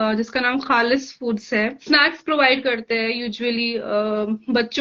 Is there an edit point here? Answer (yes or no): yes